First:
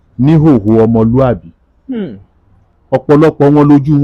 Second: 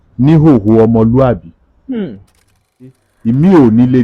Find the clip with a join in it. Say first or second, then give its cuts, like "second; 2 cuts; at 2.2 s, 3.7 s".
second; 1 cut; at 2.9 s